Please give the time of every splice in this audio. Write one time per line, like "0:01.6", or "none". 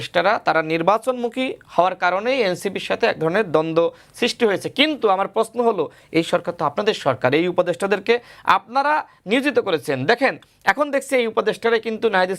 none